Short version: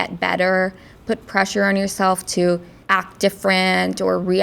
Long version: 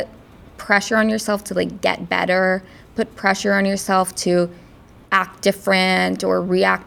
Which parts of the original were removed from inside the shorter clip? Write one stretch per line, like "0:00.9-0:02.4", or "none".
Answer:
0:04.6-0:05.0